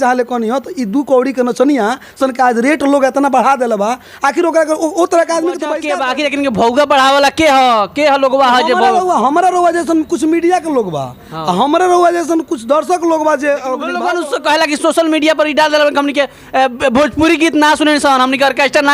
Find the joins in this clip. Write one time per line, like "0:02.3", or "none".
0:05.8
0:13.9